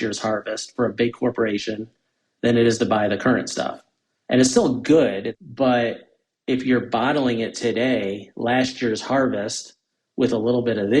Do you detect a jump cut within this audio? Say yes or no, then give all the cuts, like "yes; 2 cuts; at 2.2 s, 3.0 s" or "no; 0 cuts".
yes; 1 cut; at 5.3 s